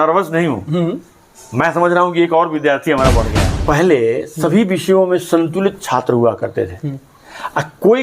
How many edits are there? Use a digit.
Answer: 1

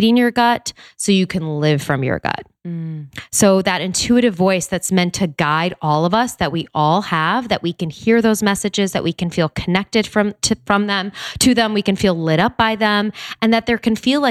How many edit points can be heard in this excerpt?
0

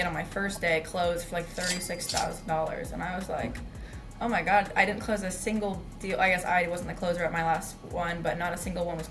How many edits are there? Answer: 0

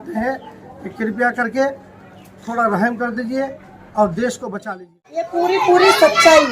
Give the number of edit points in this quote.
1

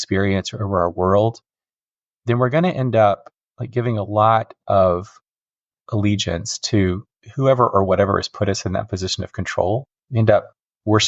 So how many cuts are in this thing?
1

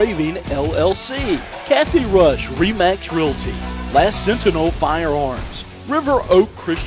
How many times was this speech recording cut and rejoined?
1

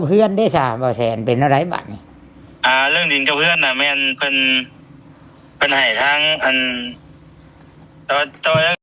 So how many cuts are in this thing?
0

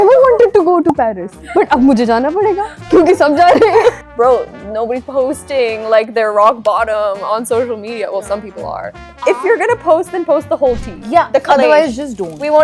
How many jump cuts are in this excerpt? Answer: 2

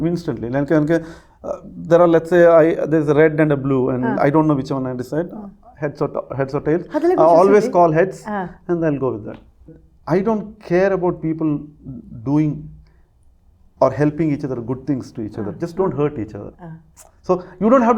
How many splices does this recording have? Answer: 1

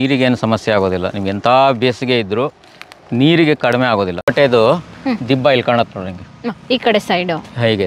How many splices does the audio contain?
1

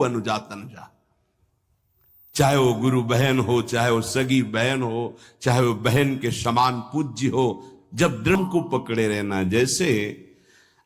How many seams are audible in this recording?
1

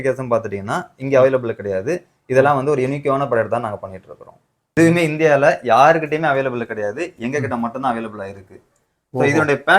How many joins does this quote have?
1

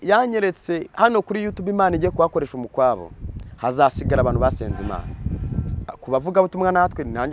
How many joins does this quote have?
0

